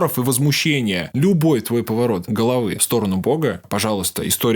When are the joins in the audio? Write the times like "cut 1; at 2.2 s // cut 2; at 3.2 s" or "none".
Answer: cut 1; at 1.1 s // cut 2; at 2.5 s // cut 3; at 3.7 s